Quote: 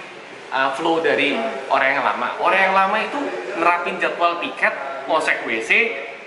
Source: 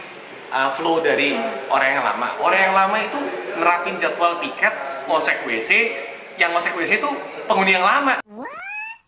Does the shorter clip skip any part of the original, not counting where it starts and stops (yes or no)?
no